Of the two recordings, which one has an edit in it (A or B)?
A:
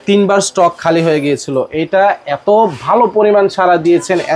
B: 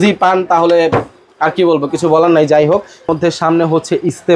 B